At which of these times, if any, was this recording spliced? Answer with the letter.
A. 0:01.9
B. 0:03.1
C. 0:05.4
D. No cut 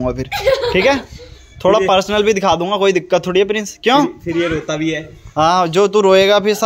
D